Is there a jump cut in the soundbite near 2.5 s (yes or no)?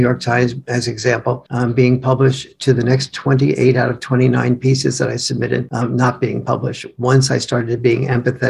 no